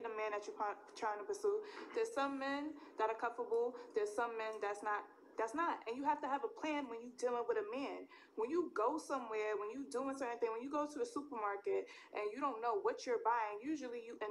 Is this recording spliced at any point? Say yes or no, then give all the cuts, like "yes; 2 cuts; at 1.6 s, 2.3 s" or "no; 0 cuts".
yes; 1 cut; at 8.5 s